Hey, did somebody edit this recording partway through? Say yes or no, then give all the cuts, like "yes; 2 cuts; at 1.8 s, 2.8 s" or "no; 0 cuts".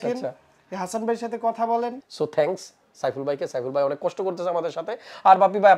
yes; 1 cut; at 2.0 s